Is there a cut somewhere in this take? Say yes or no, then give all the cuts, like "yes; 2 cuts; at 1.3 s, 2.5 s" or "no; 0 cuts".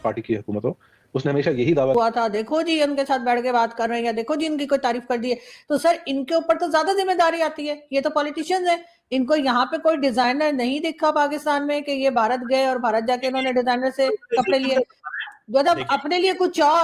yes; 1 cut; at 1.9 s